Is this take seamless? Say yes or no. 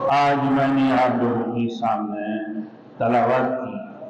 yes